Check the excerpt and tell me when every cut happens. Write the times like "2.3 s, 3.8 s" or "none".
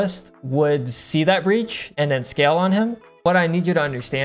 1.8 s, 3.2 s